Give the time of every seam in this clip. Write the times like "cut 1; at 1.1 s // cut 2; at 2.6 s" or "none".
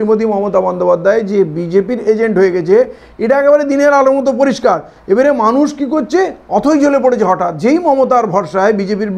none